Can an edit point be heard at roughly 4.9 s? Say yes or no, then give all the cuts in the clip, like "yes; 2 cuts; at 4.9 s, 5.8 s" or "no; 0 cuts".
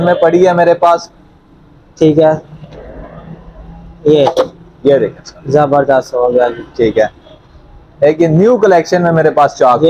no; 0 cuts